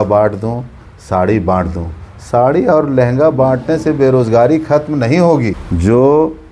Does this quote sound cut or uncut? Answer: cut